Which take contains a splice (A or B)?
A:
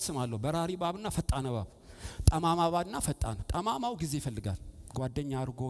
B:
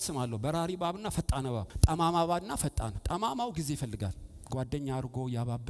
B